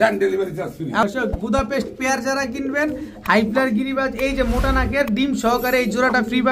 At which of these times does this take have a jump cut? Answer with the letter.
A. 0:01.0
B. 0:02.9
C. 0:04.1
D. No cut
A